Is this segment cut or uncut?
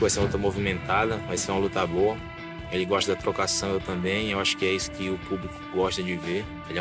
uncut